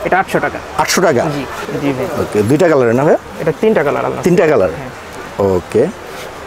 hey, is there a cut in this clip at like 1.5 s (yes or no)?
yes